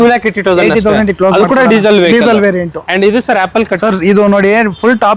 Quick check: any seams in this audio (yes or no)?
no